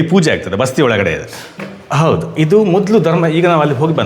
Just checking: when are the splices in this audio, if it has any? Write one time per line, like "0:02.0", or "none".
0:01.6